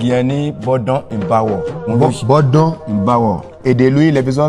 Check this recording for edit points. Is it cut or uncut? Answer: cut